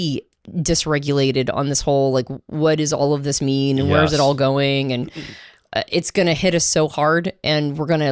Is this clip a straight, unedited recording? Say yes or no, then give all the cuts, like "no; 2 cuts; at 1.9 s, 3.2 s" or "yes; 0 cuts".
yes; 0 cuts